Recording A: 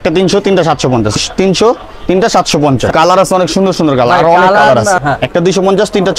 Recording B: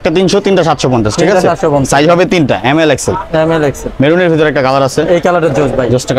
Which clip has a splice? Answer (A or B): A